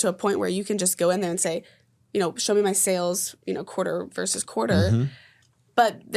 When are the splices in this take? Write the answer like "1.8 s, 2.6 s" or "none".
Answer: none